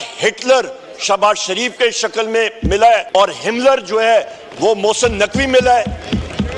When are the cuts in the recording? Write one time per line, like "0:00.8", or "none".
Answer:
0:03.0